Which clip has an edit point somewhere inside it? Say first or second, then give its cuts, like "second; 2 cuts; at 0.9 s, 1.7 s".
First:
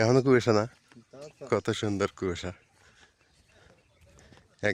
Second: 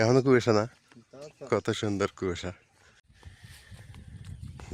second; 1 cut; at 3.0 s